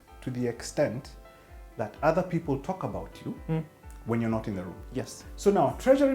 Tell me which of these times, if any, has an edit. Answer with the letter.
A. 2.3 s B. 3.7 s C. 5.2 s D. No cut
C